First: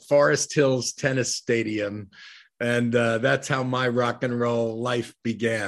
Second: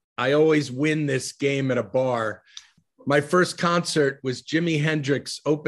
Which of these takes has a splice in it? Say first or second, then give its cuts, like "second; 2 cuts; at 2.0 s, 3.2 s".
second; 1 cut; at 2.7 s